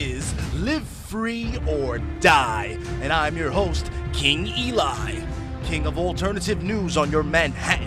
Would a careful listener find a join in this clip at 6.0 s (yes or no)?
yes